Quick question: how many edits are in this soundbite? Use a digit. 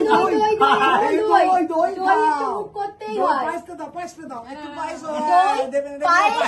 0